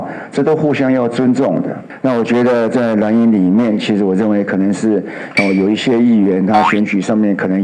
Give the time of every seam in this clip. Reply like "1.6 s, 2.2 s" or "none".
1.8 s